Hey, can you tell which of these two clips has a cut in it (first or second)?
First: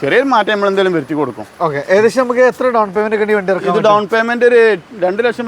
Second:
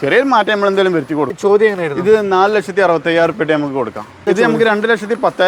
second